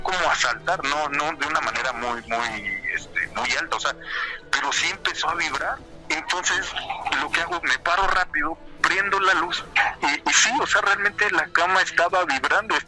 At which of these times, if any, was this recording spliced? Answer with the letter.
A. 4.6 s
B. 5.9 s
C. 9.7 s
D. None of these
B